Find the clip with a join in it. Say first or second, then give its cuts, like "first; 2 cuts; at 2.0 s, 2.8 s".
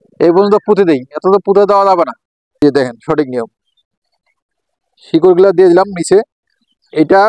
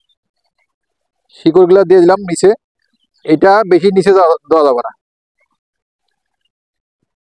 first; 1 cut; at 2.6 s